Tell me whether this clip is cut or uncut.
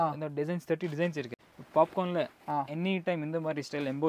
cut